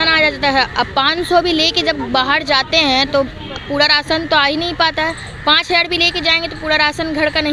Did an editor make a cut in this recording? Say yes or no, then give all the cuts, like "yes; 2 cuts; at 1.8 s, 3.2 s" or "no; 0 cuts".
no; 0 cuts